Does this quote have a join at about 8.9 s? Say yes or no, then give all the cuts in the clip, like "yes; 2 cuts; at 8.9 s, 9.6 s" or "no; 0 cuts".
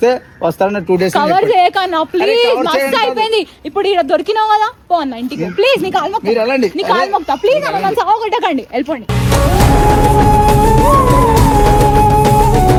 no; 0 cuts